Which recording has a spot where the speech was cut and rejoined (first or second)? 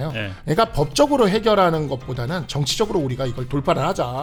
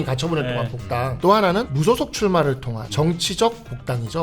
second